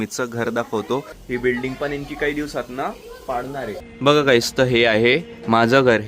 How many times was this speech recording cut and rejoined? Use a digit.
2